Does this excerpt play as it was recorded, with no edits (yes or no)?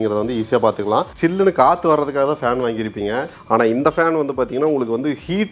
no